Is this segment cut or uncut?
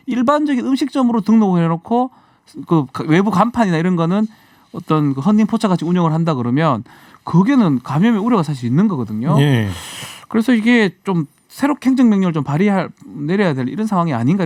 uncut